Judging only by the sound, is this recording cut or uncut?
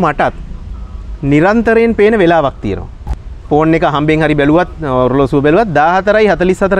uncut